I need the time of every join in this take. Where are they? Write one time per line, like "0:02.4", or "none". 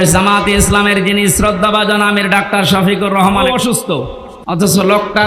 0:03.7